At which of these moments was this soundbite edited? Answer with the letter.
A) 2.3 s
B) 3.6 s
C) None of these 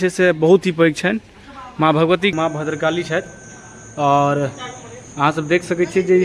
A